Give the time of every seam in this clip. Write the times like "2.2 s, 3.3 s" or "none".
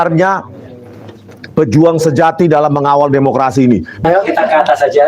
4.0 s